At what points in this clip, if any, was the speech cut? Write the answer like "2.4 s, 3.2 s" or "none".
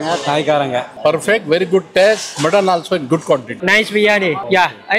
0.9 s, 3.5 s